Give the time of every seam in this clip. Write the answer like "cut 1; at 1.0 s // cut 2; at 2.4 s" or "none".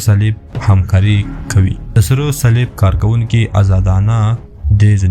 cut 1; at 2.0 s